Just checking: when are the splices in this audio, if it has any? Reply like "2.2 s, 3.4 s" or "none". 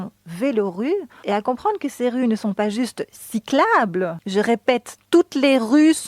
1.2 s, 4.2 s

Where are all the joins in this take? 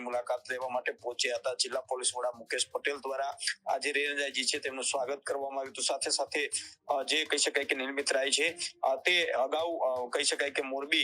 none

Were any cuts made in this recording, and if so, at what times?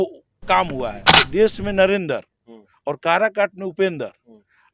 1.3 s

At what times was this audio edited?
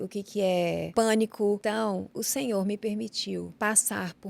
0.9 s, 2.0 s, 3.5 s

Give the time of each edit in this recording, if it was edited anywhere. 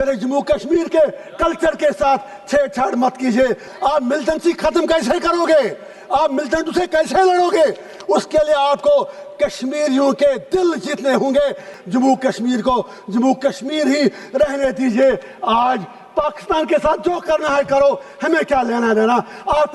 3.7 s, 11.7 s

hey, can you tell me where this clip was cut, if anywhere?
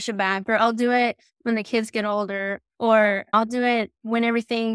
2.6 s, 3.3 s

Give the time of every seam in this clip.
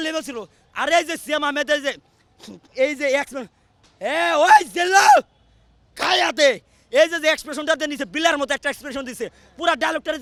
none

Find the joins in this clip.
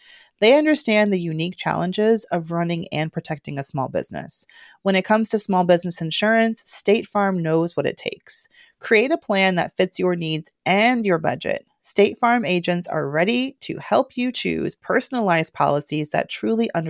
none

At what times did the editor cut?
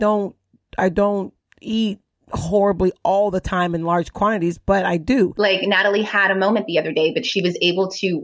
5.3 s

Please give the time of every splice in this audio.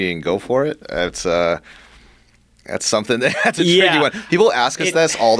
none

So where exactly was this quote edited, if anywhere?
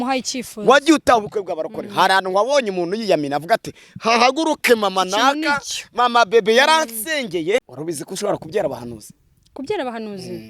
7.7 s

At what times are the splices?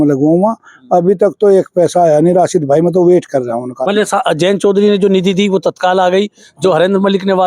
3.8 s

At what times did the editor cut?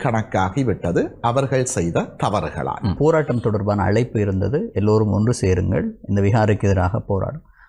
3.0 s

